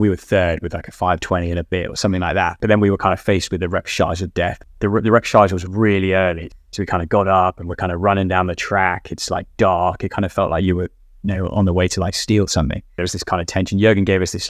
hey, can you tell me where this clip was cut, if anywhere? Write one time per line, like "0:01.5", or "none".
0:02.6
0:04.6
0:06.5
0:13.0